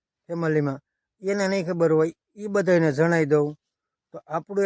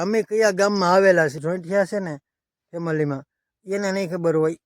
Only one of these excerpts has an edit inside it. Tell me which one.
second; 1 cut; at 1.4 s

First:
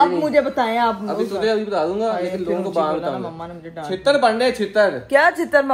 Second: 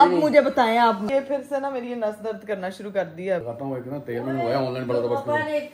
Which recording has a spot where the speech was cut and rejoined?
second; 2 cuts; at 1.1 s, 3.5 s

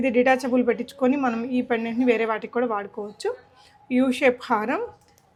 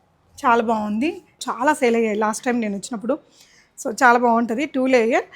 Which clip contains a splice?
second; 1 cut; at 1.4 s

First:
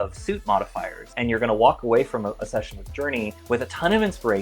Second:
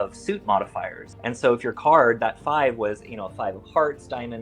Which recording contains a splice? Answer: first; 1 cut; at 1.1 s

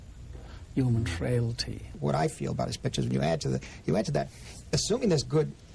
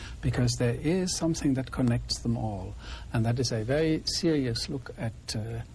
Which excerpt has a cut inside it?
first; 1 cut; at 2.0 s

